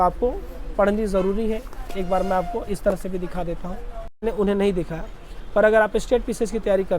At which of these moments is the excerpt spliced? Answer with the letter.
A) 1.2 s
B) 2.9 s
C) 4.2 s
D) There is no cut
C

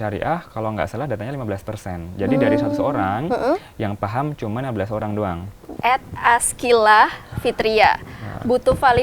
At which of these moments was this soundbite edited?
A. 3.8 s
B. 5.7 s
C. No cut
B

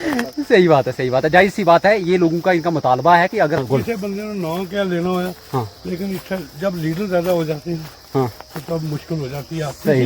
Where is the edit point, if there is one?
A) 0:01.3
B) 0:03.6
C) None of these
B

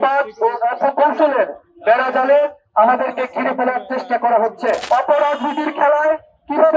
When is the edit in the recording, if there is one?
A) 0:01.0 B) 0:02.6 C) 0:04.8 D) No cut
C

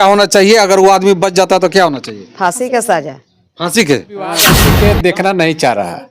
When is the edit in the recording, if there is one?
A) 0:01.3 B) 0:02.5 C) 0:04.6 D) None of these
C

